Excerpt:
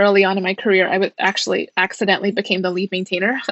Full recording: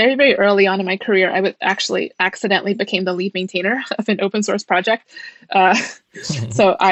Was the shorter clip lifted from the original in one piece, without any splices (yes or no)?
yes